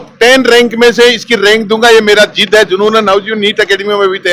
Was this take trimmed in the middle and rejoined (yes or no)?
no